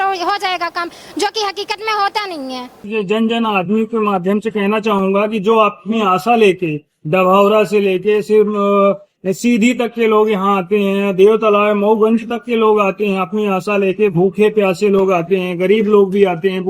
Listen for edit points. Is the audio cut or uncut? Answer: cut